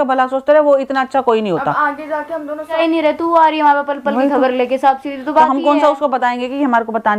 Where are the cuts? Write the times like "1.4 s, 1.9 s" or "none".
2.8 s

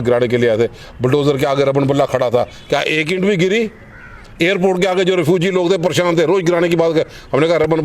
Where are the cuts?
none

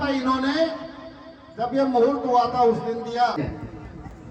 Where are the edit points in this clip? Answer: 3.4 s

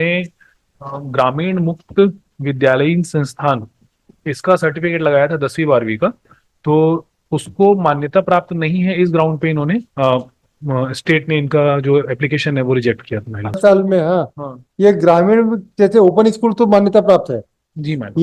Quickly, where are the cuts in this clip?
13.6 s

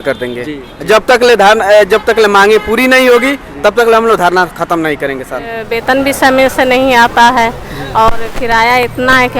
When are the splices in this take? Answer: 5.7 s

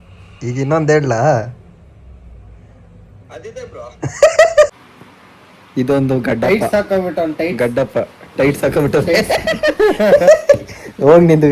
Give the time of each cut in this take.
4.7 s

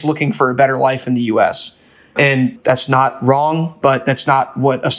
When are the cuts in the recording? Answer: 2.5 s, 3.7 s

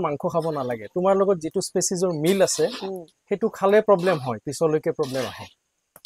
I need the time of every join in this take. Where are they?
none

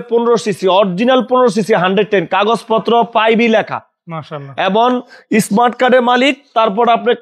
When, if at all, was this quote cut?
none

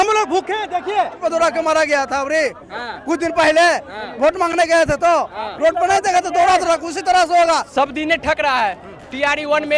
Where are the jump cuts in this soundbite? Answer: 1.2 s, 7.7 s

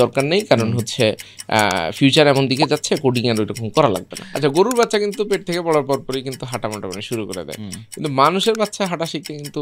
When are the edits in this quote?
4.6 s

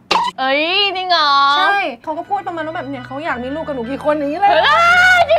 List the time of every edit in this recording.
2.0 s

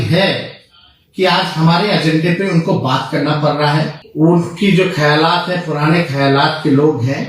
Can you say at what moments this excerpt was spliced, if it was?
4.0 s

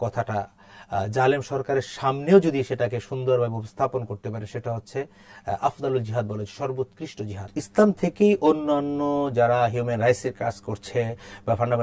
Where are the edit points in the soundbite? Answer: 7.5 s

